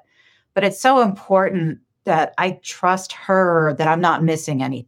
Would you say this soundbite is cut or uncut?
cut